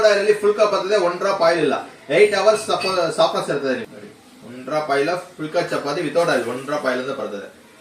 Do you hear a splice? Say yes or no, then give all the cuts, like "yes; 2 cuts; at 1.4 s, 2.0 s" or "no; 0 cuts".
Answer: yes; 1 cut; at 3.8 s